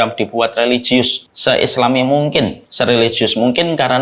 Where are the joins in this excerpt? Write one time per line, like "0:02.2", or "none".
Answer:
0:01.2
0:02.6